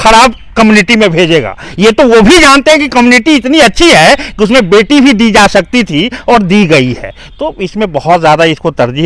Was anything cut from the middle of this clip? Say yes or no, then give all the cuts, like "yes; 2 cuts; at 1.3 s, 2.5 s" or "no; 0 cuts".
no; 0 cuts